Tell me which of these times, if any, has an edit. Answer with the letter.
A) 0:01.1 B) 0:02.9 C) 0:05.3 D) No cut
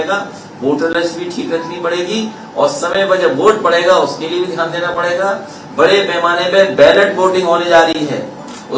D